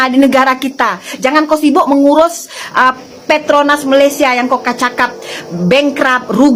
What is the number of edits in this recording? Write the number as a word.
zero